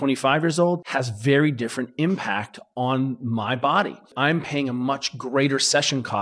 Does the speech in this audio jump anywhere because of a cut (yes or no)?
yes